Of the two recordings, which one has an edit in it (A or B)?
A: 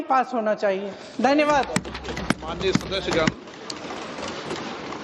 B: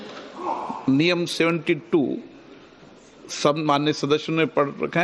A